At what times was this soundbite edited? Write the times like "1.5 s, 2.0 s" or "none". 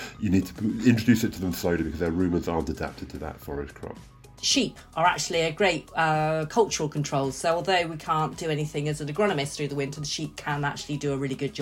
4.3 s

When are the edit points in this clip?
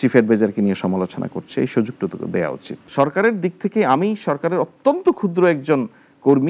2.8 s

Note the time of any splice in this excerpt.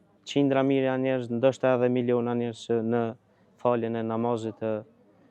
none

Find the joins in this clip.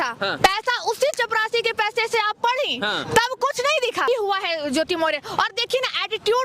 4.1 s

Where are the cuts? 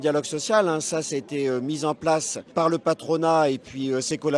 2.5 s

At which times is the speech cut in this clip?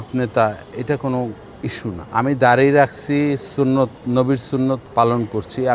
2.0 s, 4.8 s

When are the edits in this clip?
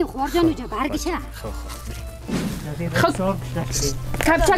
2.3 s

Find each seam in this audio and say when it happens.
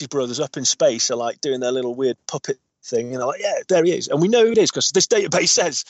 2.7 s

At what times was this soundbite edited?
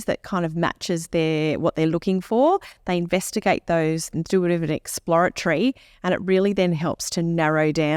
none

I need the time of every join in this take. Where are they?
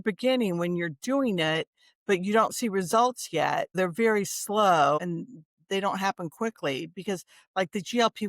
3.8 s, 5.0 s

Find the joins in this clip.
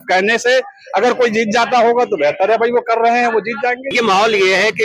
3.9 s

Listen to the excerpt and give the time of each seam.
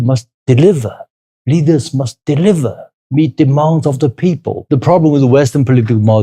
4.6 s

